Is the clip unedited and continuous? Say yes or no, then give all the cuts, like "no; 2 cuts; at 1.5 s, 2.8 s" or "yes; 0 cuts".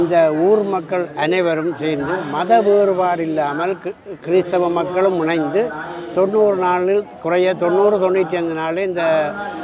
yes; 0 cuts